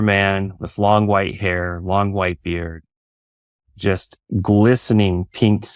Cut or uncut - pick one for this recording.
uncut